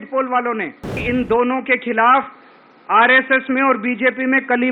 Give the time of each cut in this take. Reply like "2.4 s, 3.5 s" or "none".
1.0 s